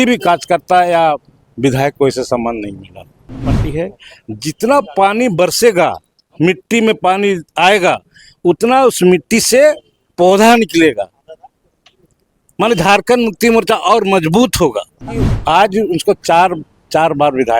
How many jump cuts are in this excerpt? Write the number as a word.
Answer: two